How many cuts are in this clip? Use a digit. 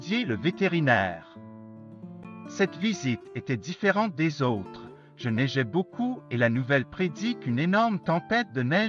2